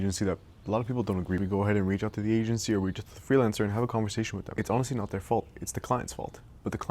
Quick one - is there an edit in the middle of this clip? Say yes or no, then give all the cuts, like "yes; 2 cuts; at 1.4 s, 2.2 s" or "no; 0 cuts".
yes; 2 cuts; at 1.4 s, 4.4 s